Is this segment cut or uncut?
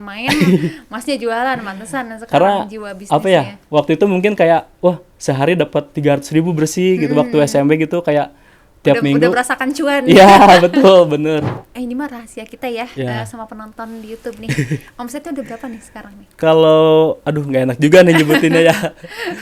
cut